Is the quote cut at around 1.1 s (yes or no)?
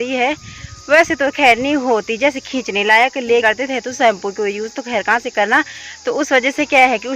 no